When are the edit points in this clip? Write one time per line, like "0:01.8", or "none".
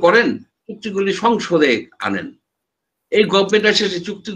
none